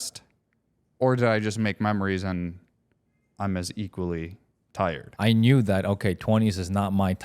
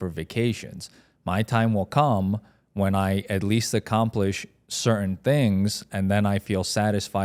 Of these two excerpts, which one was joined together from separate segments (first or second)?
first